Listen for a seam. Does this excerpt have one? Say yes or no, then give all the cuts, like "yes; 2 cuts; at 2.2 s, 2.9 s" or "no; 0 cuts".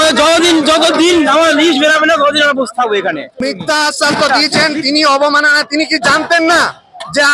yes; 1 cut; at 3.3 s